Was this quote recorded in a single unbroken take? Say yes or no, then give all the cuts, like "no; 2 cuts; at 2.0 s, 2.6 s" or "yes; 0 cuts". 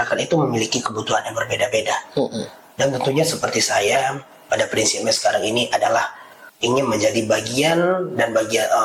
yes; 0 cuts